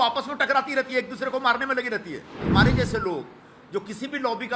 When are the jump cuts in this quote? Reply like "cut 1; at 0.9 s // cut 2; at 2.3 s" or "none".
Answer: cut 1; at 2.4 s

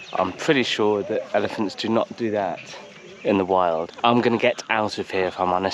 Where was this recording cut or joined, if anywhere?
cut 1; at 3.9 s

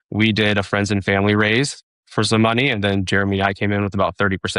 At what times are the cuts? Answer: cut 1; at 2.0 s

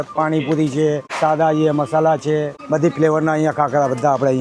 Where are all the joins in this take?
cut 1; at 1.1 s // cut 2; at 2.6 s

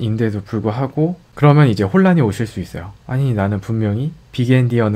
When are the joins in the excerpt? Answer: cut 1; at 1.2 s

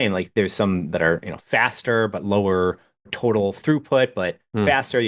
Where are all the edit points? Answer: cut 1; at 3.1 s

